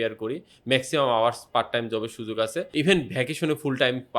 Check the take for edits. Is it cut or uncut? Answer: cut